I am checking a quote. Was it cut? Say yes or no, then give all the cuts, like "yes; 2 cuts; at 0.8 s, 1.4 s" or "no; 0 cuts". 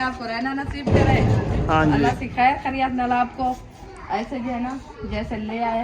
yes; 1 cut; at 1.5 s